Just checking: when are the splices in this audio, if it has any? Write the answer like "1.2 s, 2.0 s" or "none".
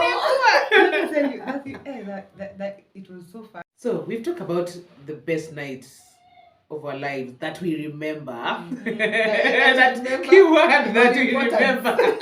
3.7 s